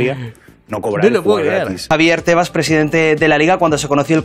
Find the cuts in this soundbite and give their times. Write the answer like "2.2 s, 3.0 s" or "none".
1.8 s

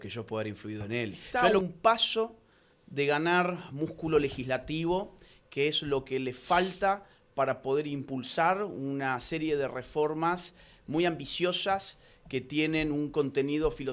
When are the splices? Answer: 1.2 s

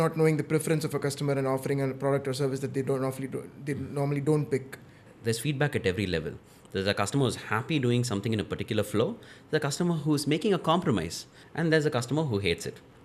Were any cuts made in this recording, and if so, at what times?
5.1 s

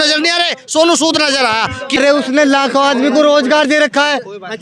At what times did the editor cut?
2.0 s

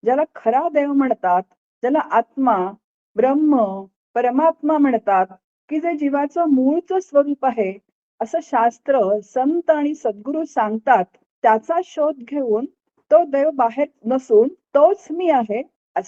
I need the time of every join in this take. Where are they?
11.3 s, 14.0 s, 14.6 s

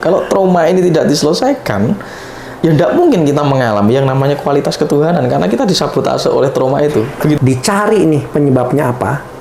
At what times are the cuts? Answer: 7.4 s

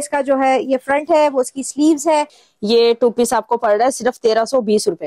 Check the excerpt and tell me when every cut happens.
2.3 s

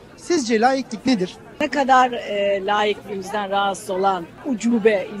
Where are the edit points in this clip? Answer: 1.5 s, 4.4 s

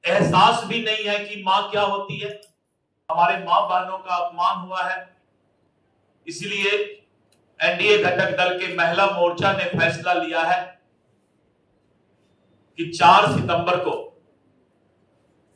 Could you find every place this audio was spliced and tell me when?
3.1 s

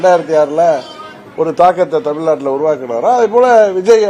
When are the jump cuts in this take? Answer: none

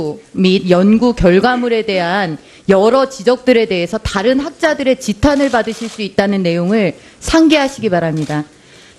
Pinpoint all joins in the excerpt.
5.2 s

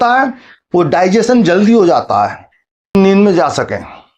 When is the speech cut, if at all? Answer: 2.9 s

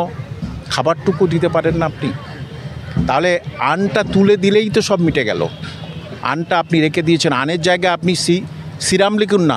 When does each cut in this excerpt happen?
none

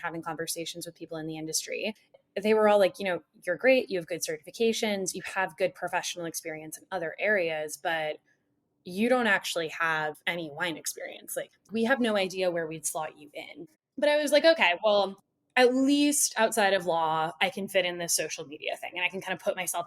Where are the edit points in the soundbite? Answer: 2.2 s, 10.2 s, 11.7 s, 13.7 s

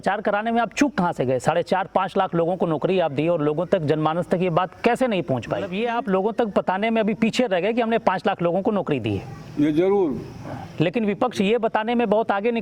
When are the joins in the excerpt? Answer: 5.7 s

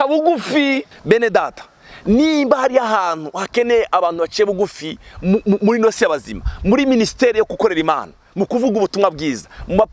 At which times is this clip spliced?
0.9 s

